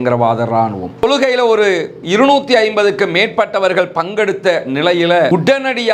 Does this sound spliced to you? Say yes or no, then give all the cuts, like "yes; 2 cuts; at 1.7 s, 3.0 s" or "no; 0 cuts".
yes; 1 cut; at 0.9 s